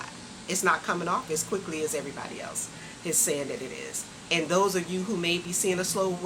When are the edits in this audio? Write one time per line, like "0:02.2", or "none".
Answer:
none